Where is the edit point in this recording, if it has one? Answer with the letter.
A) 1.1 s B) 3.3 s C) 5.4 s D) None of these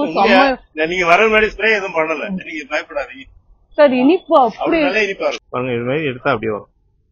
C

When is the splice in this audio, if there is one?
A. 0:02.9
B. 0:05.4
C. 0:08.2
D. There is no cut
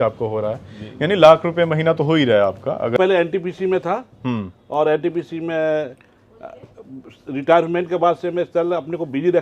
A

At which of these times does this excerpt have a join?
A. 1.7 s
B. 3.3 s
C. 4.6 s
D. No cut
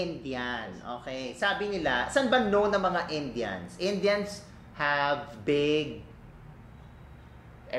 D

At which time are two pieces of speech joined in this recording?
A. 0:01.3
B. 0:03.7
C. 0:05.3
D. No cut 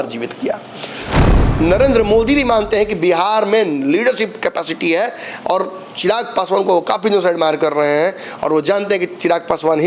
A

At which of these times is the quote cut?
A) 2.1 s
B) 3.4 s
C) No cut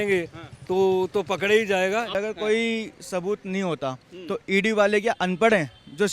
A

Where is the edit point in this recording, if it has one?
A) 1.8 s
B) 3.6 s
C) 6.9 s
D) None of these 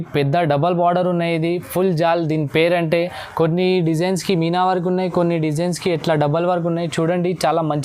D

